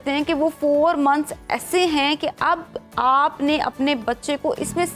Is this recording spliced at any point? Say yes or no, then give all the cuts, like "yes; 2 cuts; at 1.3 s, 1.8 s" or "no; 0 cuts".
no; 0 cuts